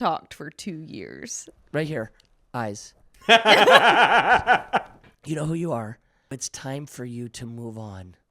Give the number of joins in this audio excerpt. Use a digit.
2